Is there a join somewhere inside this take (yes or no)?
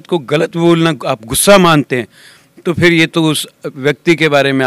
no